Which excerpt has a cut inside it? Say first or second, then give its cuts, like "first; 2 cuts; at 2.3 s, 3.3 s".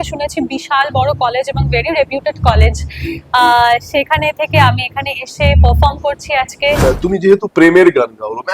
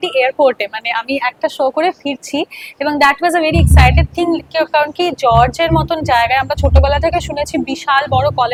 first; 1 cut; at 6.8 s